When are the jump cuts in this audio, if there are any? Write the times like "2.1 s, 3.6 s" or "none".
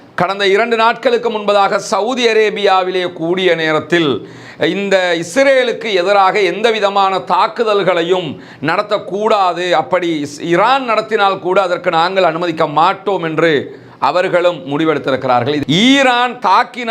15.6 s